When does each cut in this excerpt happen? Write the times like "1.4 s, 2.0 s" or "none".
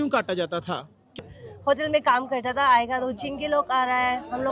1.2 s